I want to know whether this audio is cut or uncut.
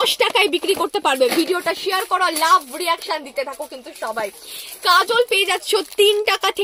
uncut